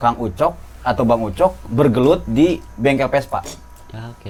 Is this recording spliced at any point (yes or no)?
no